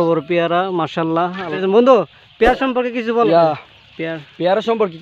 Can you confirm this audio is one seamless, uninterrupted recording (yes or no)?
no